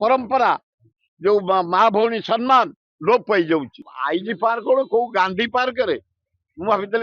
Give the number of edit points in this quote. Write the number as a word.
one